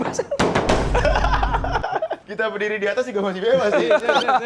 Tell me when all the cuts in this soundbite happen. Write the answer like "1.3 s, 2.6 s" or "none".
2.2 s